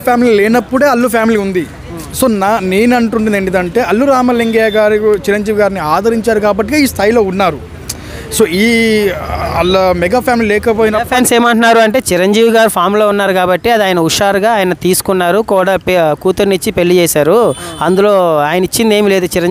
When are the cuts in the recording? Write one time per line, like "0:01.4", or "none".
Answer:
none